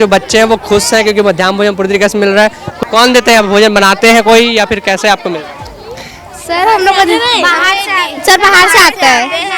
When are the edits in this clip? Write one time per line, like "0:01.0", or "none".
0:02.6